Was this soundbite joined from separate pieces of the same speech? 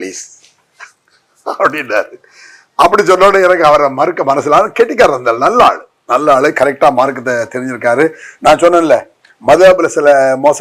no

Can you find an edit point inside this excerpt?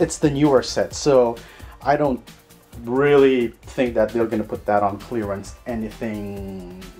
yes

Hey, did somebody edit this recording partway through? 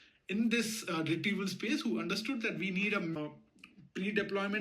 yes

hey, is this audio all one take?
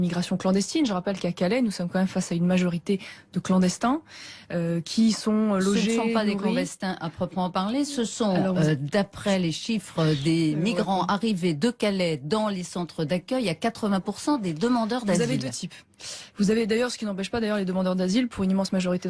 no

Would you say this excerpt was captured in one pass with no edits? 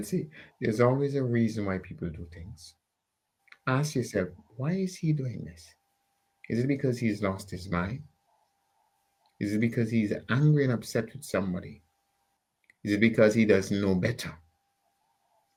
yes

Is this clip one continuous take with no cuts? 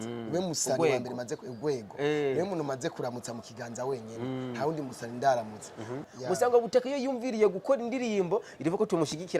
no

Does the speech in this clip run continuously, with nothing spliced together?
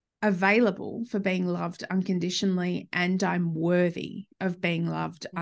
yes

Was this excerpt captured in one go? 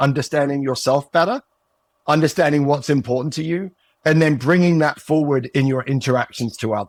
yes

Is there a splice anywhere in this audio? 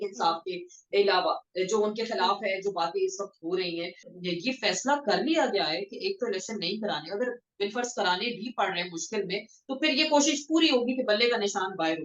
yes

